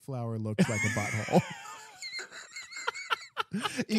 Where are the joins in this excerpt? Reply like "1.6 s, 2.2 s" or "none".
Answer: none